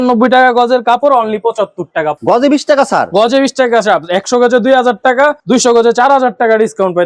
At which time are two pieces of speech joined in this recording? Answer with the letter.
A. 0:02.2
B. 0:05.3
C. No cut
A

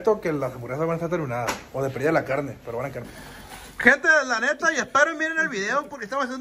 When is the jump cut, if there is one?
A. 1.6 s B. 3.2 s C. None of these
B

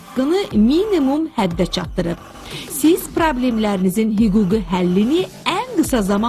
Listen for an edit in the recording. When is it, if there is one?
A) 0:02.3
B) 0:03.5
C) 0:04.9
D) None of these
C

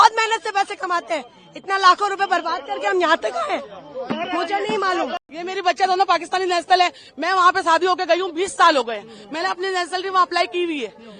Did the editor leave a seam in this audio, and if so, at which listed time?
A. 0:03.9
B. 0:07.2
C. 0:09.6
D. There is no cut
D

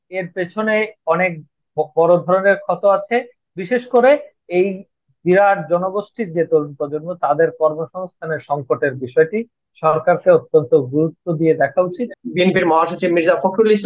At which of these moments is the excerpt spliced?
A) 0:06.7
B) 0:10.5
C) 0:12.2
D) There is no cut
C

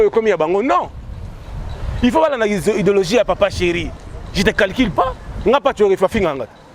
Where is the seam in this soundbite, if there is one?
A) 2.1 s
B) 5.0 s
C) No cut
C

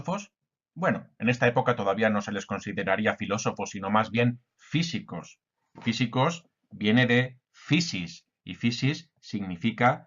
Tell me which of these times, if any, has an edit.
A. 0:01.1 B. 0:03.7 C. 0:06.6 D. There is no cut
B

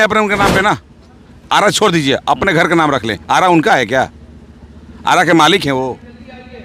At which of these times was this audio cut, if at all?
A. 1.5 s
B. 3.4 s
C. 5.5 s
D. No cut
D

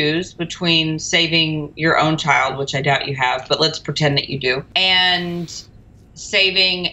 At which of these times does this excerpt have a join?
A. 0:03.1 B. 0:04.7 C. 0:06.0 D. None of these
B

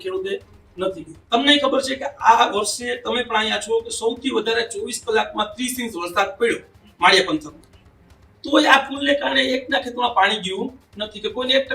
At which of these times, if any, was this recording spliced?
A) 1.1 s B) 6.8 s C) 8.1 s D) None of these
A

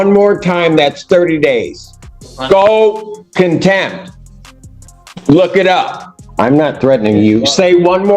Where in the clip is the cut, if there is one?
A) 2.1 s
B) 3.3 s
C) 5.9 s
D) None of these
C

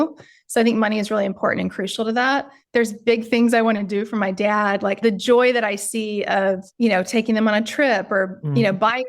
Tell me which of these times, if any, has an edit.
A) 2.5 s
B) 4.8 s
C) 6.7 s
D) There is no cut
A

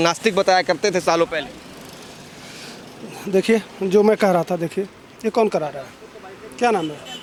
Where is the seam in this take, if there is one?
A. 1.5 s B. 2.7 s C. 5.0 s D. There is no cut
D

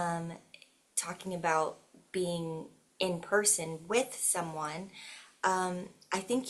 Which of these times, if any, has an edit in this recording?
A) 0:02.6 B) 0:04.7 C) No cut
C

